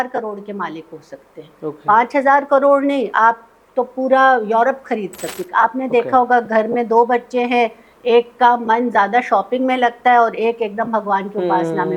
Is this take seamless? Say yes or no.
no